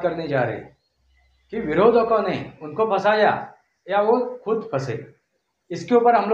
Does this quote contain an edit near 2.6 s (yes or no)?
no